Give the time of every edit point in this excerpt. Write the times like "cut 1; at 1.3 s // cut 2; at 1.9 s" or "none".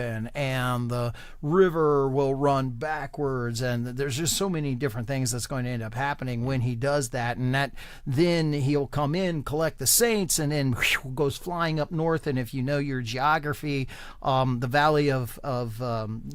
none